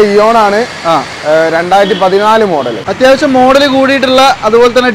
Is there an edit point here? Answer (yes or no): yes